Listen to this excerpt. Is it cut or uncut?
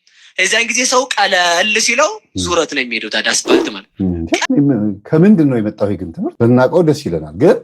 cut